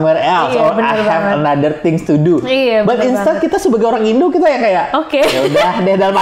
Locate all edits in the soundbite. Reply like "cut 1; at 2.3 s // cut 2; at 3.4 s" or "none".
none